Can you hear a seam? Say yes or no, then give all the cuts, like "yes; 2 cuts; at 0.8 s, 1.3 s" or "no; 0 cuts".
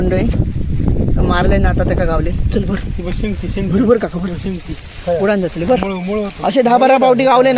no; 0 cuts